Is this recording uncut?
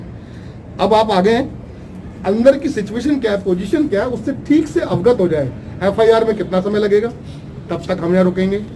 yes; 0 cuts

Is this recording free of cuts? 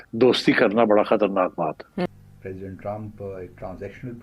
no; 1 cut; at 2.1 s

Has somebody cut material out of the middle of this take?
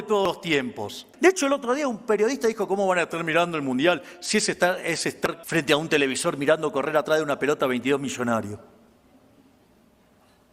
yes; 2 cuts; at 1.0 s, 5.4 s

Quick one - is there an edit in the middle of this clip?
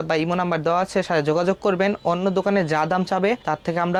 no; 0 cuts

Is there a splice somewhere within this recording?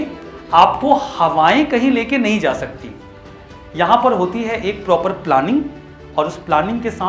no; 0 cuts

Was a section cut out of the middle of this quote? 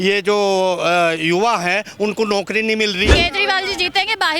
yes; 1 cut; at 3.1 s

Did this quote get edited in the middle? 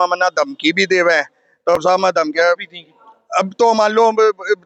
no; 0 cuts

